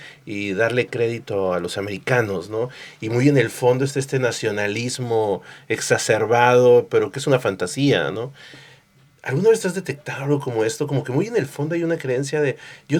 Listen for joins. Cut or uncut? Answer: uncut